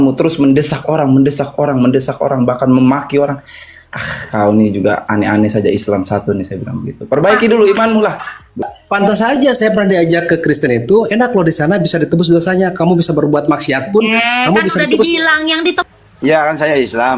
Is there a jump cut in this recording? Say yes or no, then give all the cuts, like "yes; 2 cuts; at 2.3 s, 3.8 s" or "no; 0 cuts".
yes; 2 cuts; at 8.6 s, 15.8 s